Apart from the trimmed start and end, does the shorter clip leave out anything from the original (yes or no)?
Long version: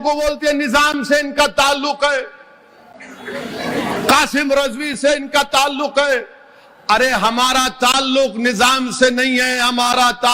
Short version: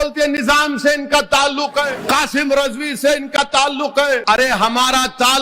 yes